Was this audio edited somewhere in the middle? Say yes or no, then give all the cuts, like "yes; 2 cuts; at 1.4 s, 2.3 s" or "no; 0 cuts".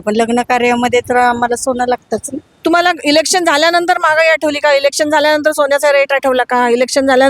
yes; 1 cut; at 2.6 s